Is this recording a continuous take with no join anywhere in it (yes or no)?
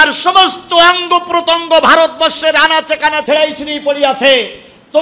no